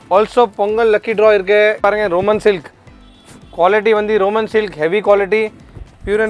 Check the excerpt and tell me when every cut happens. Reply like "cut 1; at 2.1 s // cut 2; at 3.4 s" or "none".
cut 1; at 1.8 s